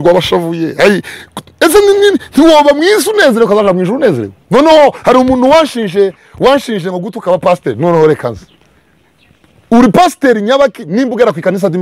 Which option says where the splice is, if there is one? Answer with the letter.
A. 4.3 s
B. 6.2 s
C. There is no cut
A